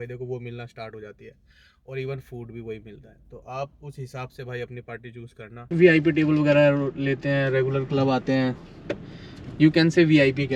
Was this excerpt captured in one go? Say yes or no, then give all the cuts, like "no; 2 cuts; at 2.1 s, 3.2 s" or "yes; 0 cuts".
no; 1 cut; at 5.6 s